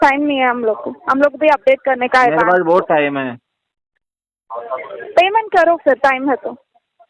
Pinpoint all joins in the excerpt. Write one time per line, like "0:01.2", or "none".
none